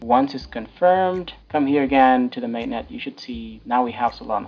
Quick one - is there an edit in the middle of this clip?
yes; 2 cuts; at 1.3 s, 3.5 s

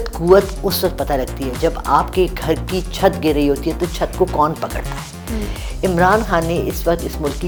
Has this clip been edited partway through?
no; 0 cuts

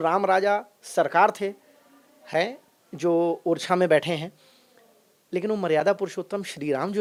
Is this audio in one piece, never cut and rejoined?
yes; 0 cuts

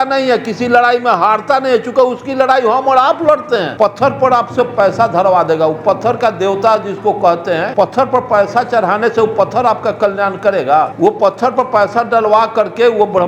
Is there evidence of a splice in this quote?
yes; 3 cuts; at 3.7 s, 7.7 s, 10.9 s

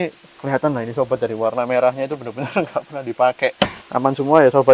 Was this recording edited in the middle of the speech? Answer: yes; 1 cut; at 3.8 s

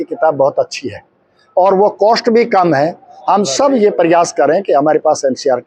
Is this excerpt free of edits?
yes; 0 cuts

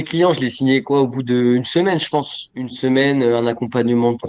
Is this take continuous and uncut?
yes; 0 cuts

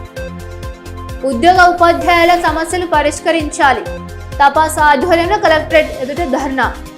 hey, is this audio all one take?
yes; 0 cuts

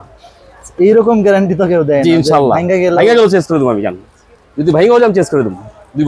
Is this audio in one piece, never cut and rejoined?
yes; 0 cuts

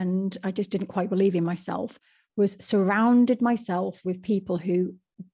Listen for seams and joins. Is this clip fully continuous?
yes; 0 cuts

